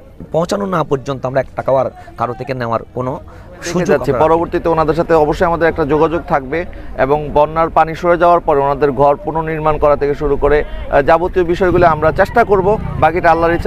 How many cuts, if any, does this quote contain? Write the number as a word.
one